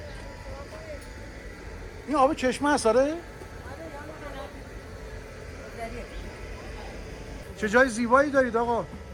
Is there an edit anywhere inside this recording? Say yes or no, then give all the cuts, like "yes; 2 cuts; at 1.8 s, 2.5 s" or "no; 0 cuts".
no; 0 cuts